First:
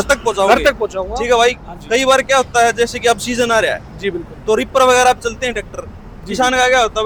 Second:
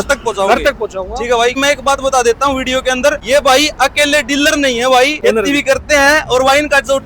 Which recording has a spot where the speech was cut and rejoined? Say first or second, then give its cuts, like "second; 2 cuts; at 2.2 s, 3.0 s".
second; 3 cuts; at 1.6 s, 3.2 s, 5.2 s